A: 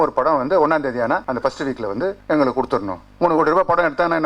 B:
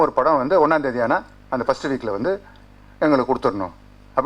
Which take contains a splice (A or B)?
A